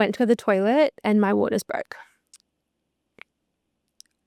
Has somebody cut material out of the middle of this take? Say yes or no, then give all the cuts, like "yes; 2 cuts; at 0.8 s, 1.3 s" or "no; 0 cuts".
no; 0 cuts